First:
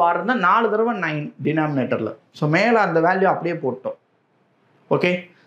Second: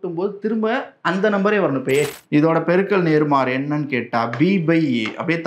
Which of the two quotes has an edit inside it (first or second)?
second